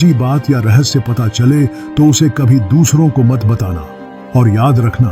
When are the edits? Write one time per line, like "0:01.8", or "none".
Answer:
0:04.0